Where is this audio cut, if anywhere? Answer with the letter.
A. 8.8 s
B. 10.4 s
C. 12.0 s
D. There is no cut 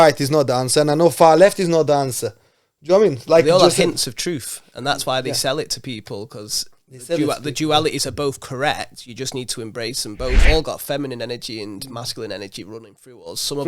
B